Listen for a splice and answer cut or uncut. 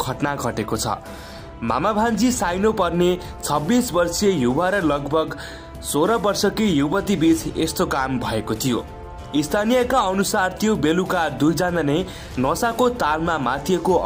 uncut